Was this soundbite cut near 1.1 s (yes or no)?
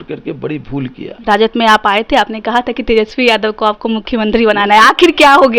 yes